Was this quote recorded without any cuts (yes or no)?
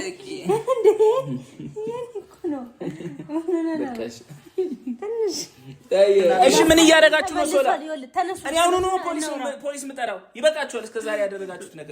no